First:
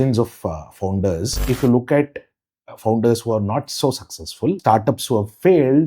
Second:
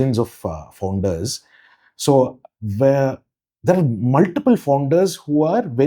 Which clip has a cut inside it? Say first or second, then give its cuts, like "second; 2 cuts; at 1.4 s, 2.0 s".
first; 2 cuts; at 1.4 s, 4.6 s